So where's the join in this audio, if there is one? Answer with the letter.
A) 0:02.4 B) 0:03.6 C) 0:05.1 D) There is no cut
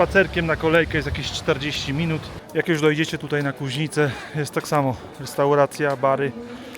A